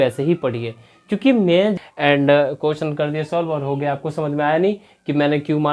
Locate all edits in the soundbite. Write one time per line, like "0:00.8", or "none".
0:01.7